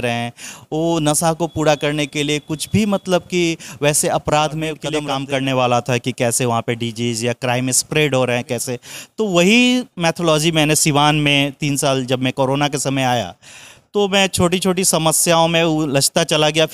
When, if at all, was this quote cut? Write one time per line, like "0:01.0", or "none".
0:04.9